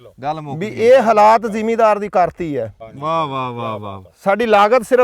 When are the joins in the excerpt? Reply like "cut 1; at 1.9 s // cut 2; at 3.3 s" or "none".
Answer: cut 1; at 2.9 s

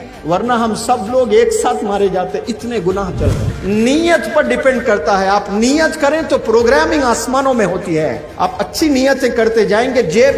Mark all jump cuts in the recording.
cut 1; at 3.5 s // cut 2; at 8.3 s

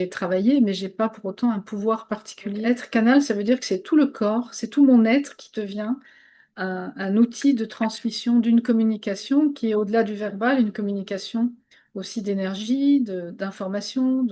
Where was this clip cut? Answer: cut 1; at 2.6 s

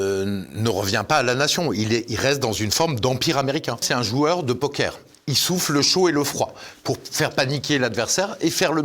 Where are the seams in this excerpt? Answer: cut 1; at 3.8 s

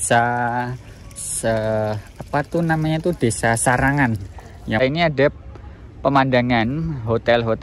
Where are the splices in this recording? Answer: cut 1; at 4.8 s

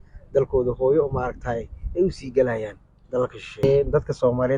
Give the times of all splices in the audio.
cut 1; at 3.6 s

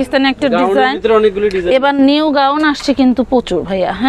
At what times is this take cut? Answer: none

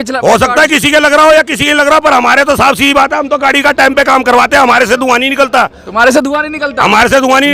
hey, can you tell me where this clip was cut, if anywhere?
none

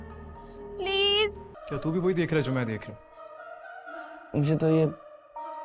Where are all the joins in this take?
cut 1; at 1.5 s

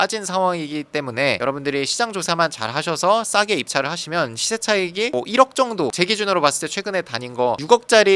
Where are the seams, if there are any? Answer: none

